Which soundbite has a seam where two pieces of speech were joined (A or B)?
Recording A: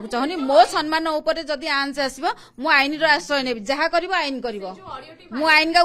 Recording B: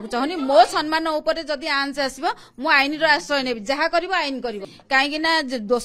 B